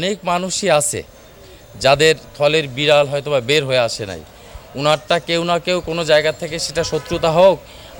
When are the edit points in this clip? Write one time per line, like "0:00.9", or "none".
none